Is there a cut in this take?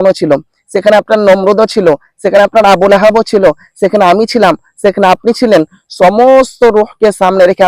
no; 0 cuts

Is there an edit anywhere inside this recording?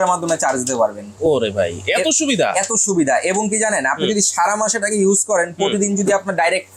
no; 0 cuts

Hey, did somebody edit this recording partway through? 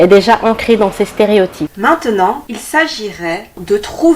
yes; 2 cuts; at 1.7 s, 2.5 s

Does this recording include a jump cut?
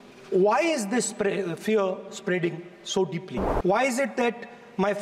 yes; 1 cut; at 3.4 s

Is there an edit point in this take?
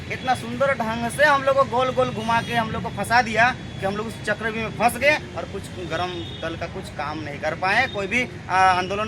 no; 0 cuts

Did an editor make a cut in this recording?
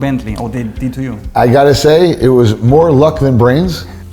no; 0 cuts

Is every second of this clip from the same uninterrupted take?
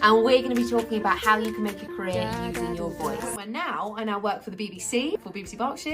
no; 2 cuts; at 3.4 s, 5.2 s

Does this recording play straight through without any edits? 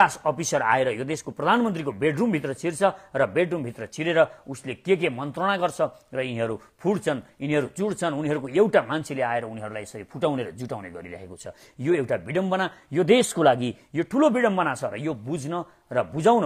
yes; 0 cuts

